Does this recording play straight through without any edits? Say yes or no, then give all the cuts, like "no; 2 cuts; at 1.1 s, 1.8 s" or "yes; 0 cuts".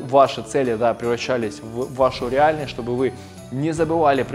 yes; 0 cuts